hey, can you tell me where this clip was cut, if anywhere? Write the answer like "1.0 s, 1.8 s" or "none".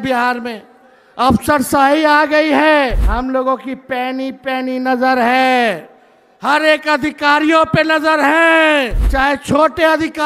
3.0 s, 9.0 s